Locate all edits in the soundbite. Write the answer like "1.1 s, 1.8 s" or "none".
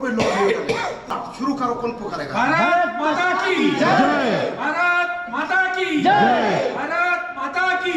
1.1 s